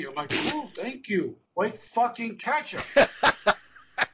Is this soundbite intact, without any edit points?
no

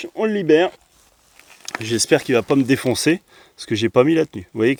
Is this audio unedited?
yes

